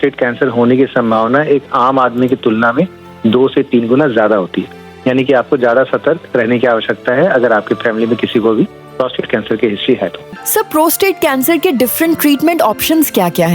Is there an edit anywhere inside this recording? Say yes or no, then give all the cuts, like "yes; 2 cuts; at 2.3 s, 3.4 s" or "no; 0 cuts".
yes; 1 cut; at 10.3 s